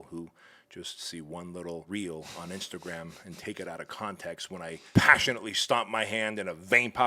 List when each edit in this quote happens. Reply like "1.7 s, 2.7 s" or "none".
1.8 s, 4.8 s

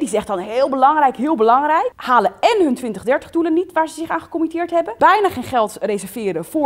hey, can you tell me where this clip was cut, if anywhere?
2.0 s, 4.9 s

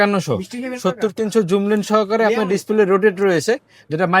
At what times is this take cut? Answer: none

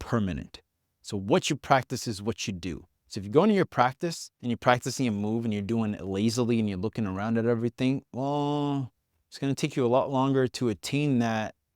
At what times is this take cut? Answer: 4.3 s

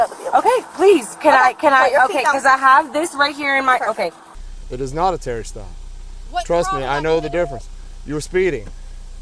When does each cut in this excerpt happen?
4.3 s

